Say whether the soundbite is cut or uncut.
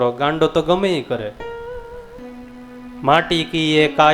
cut